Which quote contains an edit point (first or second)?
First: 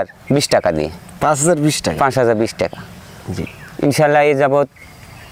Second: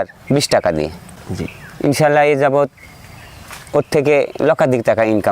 second